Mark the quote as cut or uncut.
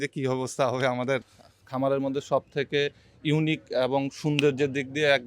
cut